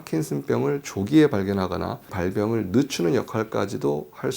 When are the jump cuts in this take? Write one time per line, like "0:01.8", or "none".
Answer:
0:02.1